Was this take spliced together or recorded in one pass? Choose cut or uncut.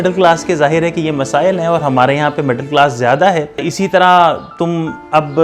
uncut